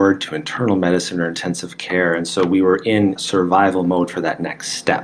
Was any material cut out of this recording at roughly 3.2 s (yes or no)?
yes